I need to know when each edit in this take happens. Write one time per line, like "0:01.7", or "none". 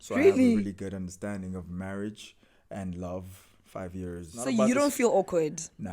0:04.3